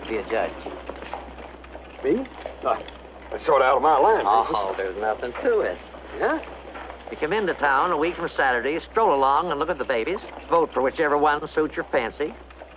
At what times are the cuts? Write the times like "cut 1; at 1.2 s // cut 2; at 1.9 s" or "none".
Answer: none